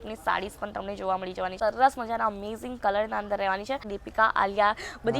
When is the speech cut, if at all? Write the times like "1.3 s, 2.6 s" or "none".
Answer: 1.5 s, 3.9 s